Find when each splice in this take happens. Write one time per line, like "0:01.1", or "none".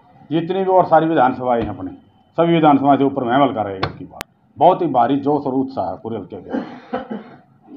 none